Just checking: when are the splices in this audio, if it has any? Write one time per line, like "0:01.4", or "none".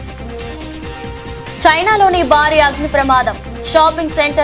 none